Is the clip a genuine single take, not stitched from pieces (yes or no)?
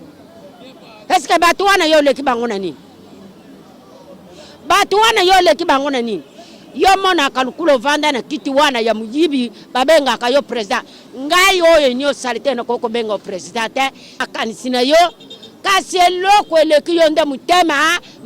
no